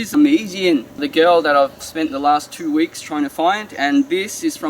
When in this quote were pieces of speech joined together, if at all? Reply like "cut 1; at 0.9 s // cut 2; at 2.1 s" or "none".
cut 1; at 1.0 s // cut 2; at 1.8 s